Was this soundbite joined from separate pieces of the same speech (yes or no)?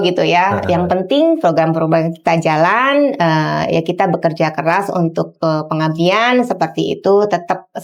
no